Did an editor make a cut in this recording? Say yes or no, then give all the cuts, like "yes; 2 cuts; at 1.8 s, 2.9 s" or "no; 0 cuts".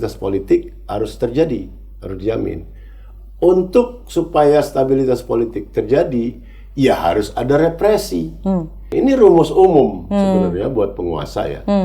yes; 1 cut; at 8.9 s